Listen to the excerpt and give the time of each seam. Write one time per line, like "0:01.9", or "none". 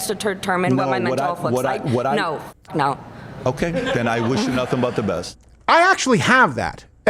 0:05.3

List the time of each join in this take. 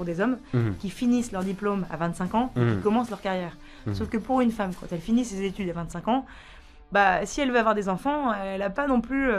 none

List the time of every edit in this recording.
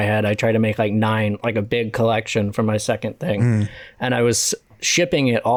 none

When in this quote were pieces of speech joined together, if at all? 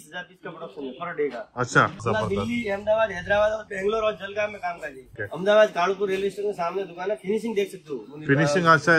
0:02.0
0:05.2

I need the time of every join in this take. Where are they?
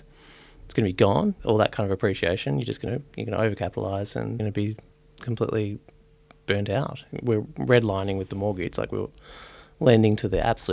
0:04.4

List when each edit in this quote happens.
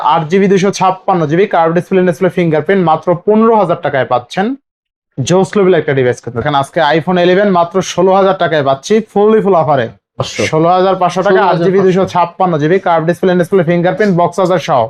0:06.4
0:10.3

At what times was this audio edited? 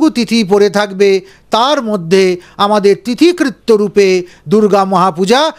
none

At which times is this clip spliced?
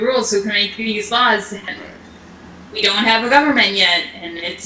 0:01.6

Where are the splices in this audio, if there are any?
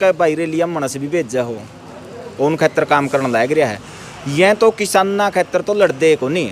none

